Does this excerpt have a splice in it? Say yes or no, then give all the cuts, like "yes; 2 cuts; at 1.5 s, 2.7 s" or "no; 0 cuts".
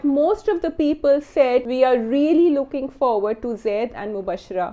yes; 1 cut; at 1.7 s